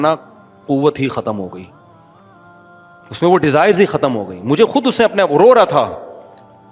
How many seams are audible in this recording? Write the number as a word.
zero